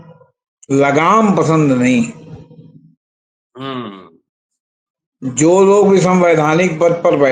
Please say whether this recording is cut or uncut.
uncut